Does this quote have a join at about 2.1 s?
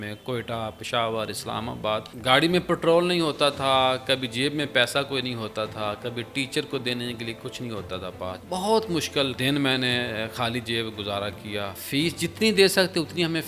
yes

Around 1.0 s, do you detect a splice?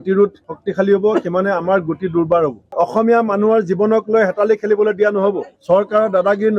no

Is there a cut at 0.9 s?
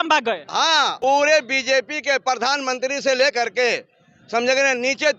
yes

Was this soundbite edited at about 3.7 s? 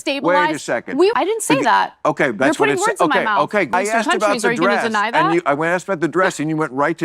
yes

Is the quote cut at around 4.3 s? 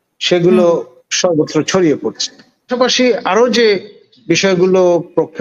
no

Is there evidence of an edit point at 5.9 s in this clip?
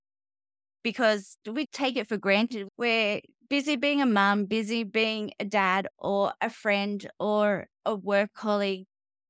no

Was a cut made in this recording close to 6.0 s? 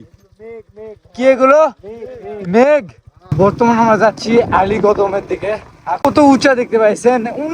yes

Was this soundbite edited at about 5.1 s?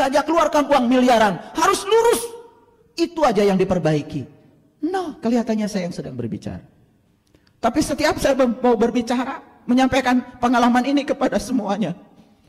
yes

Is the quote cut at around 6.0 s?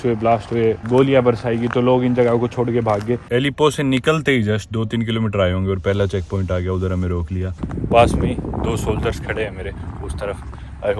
no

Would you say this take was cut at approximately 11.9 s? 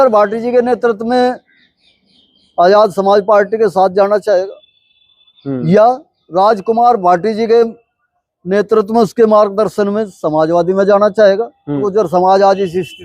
yes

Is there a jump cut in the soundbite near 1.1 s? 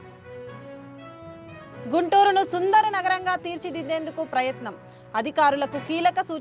yes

